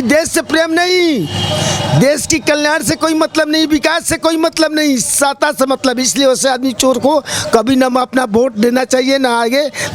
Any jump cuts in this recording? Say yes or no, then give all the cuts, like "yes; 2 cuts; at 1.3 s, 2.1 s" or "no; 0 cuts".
no; 0 cuts